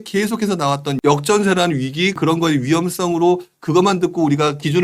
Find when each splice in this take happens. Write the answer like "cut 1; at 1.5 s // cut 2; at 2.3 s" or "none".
cut 1; at 0.9 s // cut 2; at 2.1 s